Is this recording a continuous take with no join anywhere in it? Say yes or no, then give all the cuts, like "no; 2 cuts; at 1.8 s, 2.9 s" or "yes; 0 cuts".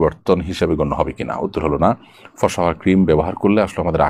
yes; 0 cuts